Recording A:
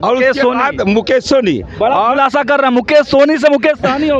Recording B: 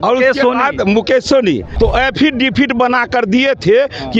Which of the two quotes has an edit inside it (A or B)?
B